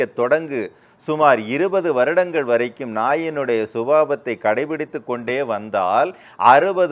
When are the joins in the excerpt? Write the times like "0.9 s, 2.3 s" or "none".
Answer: none